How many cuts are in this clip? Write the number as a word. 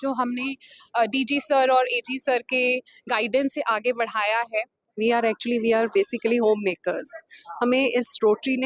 one